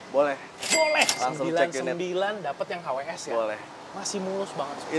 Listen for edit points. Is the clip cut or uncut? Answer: uncut